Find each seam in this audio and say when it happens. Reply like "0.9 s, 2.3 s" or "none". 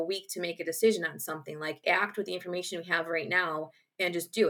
1.8 s